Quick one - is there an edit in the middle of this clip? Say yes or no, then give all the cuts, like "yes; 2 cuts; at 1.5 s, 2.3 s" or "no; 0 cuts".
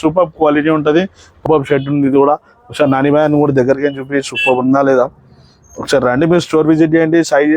yes; 1 cut; at 1.4 s